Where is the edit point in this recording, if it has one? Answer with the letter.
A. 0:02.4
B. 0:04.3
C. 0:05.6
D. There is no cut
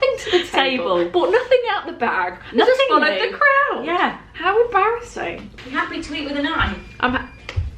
C